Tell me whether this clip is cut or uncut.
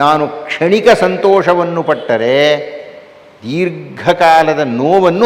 uncut